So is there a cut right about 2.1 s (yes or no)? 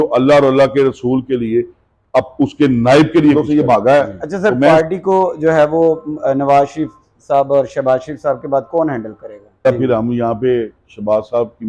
no